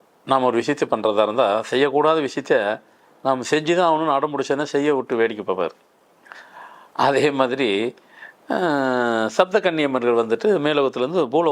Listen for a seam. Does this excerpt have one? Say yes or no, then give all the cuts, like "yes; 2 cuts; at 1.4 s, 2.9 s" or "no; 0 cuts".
no; 0 cuts